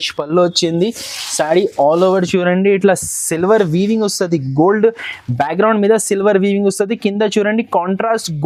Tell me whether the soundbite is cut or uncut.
uncut